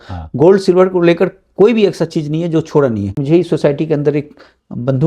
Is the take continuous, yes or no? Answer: no